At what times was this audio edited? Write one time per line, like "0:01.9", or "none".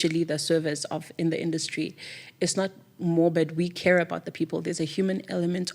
0:03.0